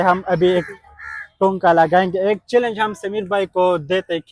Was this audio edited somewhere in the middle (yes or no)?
no